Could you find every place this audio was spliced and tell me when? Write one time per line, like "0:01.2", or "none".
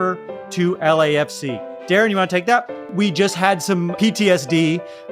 0:02.8